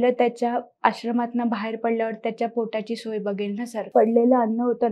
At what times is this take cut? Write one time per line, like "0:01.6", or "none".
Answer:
0:03.9